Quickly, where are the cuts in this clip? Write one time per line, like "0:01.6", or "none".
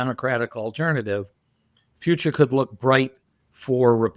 none